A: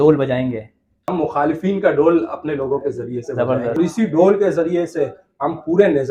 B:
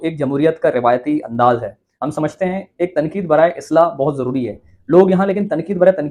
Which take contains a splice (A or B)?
A